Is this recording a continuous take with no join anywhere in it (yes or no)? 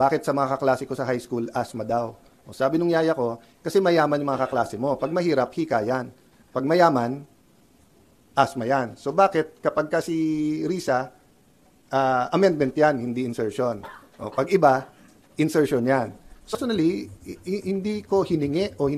no